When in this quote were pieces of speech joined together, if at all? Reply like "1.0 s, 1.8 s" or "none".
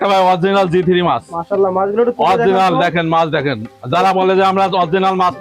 none